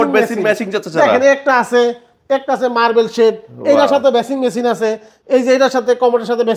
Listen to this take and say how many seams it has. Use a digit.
0